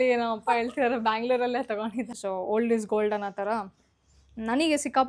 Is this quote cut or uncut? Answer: cut